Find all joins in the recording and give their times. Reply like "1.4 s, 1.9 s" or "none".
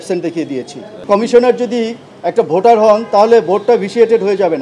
1.0 s